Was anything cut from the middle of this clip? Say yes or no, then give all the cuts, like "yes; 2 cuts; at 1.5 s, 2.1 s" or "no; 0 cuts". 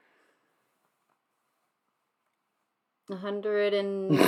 no; 0 cuts